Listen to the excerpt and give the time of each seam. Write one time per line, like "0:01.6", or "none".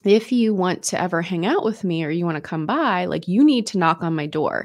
none